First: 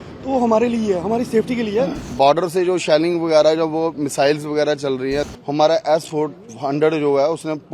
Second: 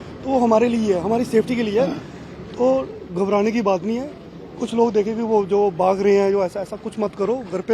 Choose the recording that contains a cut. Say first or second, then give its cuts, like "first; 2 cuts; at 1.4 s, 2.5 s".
first; 2 cuts; at 2.1 s, 5.3 s